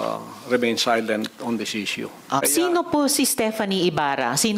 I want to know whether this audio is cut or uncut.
cut